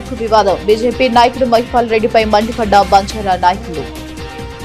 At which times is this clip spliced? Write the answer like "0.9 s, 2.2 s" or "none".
none